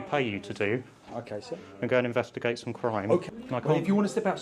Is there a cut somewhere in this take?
yes; 1 cut; at 3.3 s

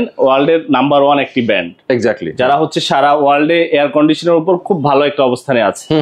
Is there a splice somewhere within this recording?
no; 0 cuts

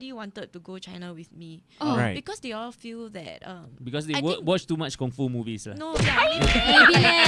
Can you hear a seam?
no; 0 cuts

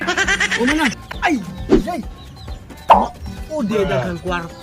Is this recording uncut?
no; 1 cut; at 1.1 s

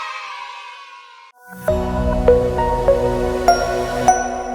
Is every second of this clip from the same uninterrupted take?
no; 1 cut; at 1.5 s

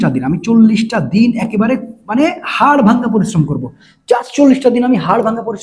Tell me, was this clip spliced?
no; 0 cuts

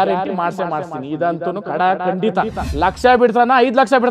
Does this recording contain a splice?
yes; 1 cut; at 2.6 s

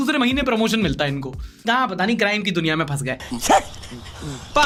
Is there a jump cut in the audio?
no; 0 cuts

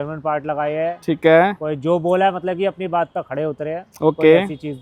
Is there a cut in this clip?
no; 0 cuts

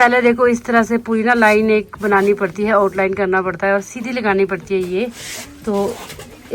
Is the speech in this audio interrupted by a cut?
no; 0 cuts

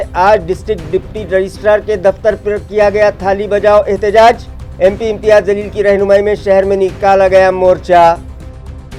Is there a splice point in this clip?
no; 0 cuts

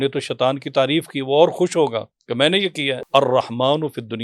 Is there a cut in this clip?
yes; 1 cut; at 3.0 s

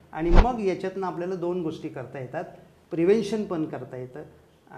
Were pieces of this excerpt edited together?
no; 0 cuts

